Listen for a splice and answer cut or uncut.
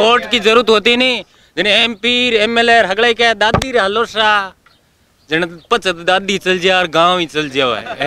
uncut